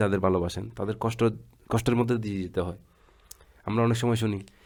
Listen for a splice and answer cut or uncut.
uncut